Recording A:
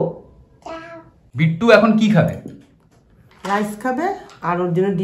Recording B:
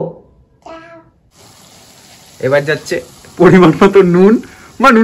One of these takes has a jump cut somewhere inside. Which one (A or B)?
B